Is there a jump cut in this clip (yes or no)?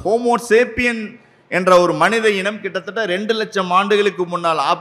no